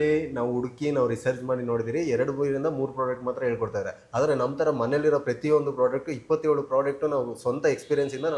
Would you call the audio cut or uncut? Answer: uncut